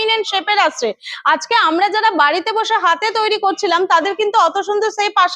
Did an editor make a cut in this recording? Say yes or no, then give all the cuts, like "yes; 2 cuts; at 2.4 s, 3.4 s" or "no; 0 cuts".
no; 0 cuts